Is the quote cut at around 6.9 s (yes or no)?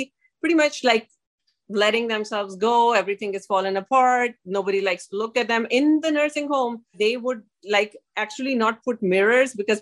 yes